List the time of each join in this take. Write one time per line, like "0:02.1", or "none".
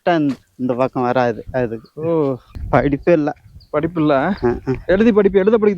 0:02.5

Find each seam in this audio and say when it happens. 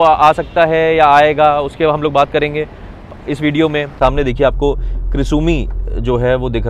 0:03.9

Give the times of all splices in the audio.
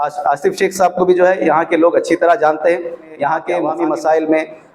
0:03.7

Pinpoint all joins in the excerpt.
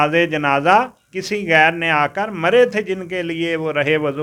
none

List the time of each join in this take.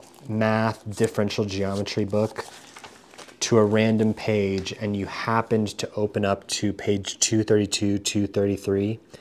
none

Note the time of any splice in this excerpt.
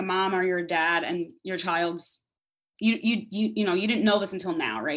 none

